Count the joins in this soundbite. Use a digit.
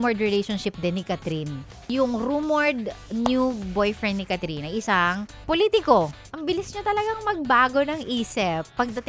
2